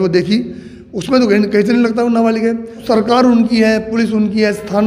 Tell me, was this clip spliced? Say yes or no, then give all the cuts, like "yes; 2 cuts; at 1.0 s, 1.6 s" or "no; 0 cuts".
yes; 1 cut; at 2.7 s